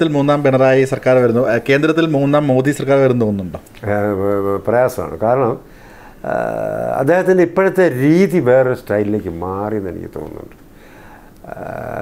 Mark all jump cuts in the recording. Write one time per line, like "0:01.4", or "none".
none